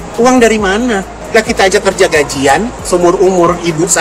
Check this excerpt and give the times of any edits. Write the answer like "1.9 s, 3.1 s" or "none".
1.1 s, 2.8 s

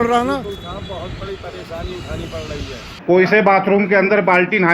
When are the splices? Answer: 2.9 s

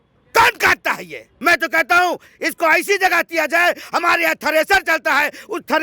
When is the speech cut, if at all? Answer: 1.3 s

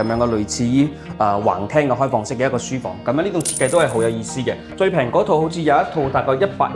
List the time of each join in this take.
4.7 s

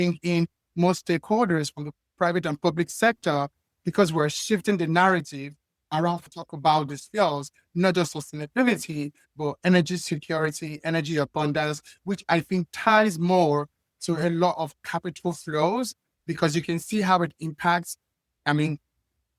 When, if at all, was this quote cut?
6.2 s

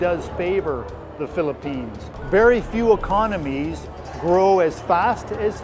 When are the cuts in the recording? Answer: 2.1 s

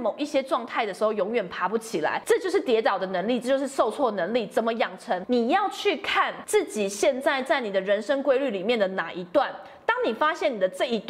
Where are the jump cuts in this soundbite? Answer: 2.2 s, 5.2 s, 6.4 s

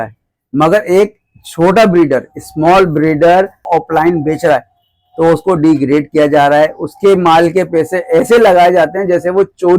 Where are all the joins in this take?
3.7 s

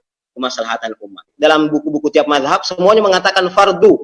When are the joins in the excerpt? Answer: 1.2 s

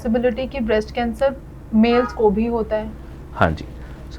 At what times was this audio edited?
none

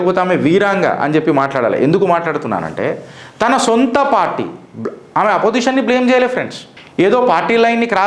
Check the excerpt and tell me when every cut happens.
none

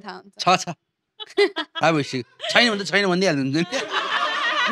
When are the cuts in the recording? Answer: none

